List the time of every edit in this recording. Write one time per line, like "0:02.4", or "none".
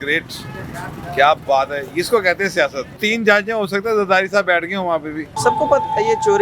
0:03.0
0:05.3